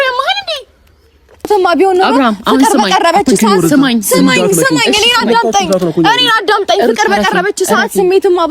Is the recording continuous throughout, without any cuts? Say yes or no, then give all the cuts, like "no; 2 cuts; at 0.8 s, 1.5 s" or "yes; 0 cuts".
no; 1 cut; at 1.5 s